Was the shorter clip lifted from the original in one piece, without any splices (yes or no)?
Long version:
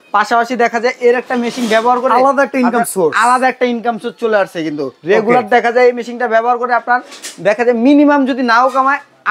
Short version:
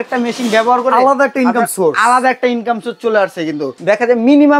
no